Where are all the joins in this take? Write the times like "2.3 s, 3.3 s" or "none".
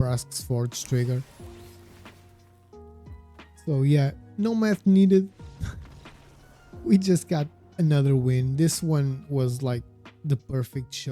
1.3 s, 3.1 s